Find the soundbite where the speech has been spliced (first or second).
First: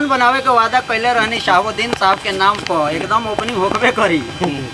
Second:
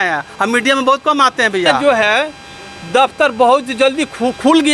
second